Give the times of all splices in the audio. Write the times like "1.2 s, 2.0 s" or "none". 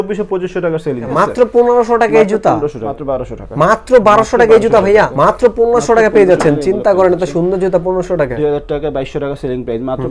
1.1 s, 2.8 s, 5.1 s, 8.3 s